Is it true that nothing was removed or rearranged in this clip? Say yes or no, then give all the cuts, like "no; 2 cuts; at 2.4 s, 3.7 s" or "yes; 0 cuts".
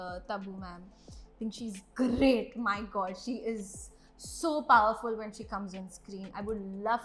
yes; 0 cuts